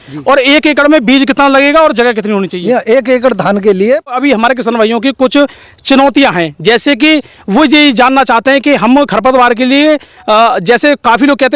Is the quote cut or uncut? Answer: cut